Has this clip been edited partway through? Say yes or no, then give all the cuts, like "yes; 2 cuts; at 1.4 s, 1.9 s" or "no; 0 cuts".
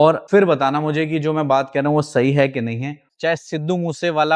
yes; 1 cut; at 3.0 s